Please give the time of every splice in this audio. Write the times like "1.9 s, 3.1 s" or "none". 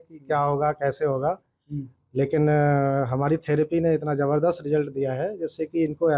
none